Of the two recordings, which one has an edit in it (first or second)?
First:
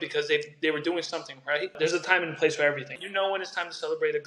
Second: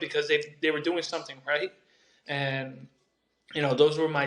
first